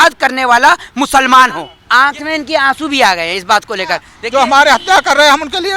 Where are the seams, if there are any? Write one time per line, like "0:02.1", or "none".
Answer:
0:01.8
0:04.1